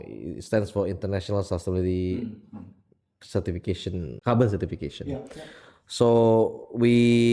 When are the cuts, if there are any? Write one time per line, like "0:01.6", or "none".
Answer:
0:04.1